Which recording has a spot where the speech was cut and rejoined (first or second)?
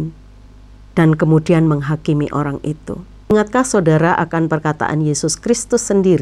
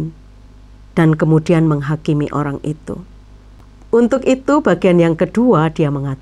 first